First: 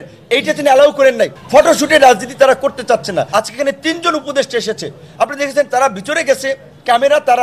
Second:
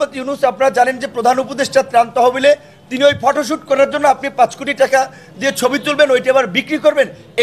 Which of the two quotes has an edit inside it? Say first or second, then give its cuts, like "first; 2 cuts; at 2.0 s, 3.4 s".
first; 2 cuts; at 1.3 s, 3.3 s